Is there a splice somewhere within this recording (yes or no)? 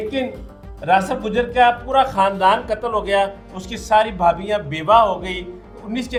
no